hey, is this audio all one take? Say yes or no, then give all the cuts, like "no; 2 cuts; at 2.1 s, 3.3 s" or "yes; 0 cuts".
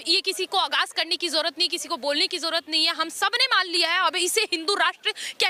yes; 0 cuts